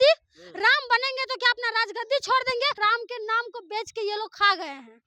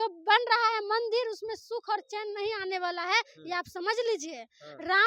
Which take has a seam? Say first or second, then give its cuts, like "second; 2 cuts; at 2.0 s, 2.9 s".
first; 1 cut; at 2.8 s